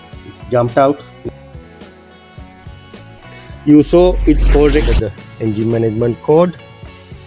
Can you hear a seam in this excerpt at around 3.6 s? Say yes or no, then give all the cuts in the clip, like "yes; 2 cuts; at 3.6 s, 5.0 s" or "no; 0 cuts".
yes; 4 cuts; at 1.3 s, 3.6 s, 4.7 s, 6.5 s